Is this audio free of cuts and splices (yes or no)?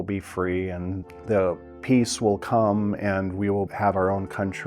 no